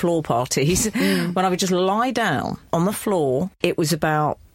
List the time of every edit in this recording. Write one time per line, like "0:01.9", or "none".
0:02.6
0:03.5